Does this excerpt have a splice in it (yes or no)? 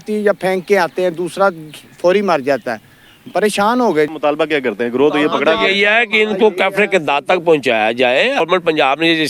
no